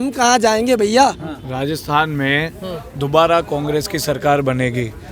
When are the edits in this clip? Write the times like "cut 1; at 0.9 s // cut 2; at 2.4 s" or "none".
none